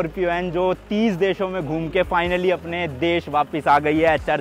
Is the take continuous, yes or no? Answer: yes